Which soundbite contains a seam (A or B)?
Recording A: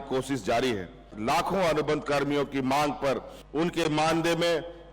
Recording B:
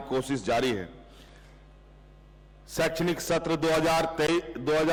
A